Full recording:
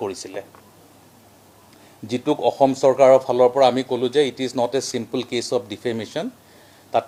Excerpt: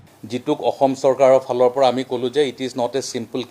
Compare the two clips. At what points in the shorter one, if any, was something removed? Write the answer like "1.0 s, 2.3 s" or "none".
none

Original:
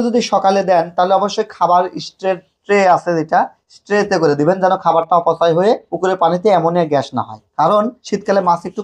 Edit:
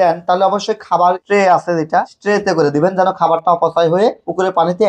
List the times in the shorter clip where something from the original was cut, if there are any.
1.2 s, 2.1 s

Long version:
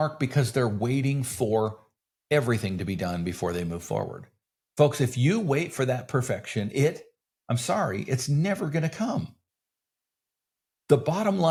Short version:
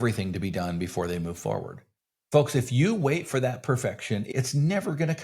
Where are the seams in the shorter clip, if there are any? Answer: 4.3 s

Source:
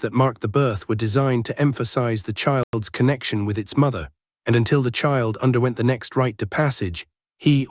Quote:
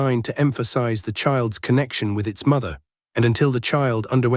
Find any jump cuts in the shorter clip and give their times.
1.5 s

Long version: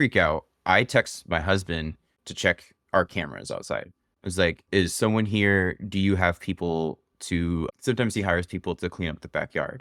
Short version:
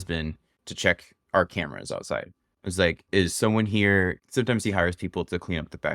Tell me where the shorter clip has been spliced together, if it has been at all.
4.2 s

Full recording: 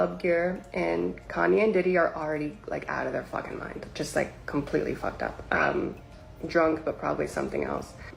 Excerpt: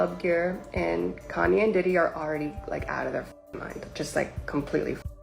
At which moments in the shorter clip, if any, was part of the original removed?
none

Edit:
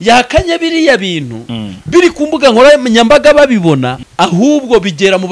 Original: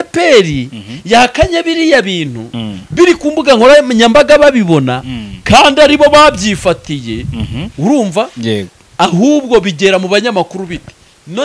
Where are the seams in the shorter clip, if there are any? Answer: 4.0 s

